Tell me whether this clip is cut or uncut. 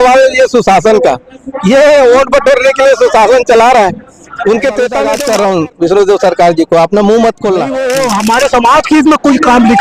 cut